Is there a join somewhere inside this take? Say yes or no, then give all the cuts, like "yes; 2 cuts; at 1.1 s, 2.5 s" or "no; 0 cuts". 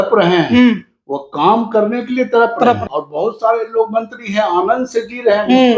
yes; 1 cut; at 2.8 s